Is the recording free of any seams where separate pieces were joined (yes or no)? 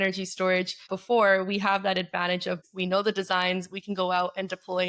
no